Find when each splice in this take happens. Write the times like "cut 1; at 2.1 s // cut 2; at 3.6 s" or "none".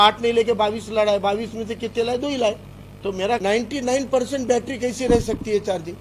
cut 1; at 3.4 s